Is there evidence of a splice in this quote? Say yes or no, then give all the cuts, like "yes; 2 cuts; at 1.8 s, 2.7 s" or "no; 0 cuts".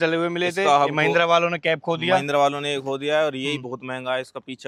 no; 0 cuts